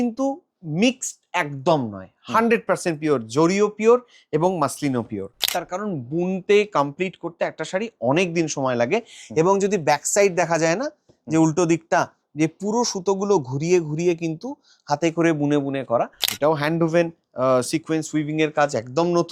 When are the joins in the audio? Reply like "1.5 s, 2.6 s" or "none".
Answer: 5.5 s, 16.2 s